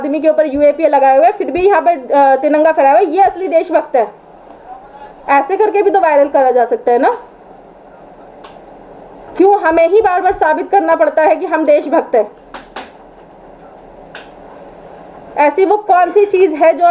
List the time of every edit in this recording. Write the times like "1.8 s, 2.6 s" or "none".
none